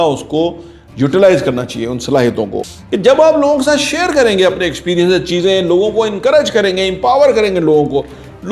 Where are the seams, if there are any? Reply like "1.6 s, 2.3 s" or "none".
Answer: 2.6 s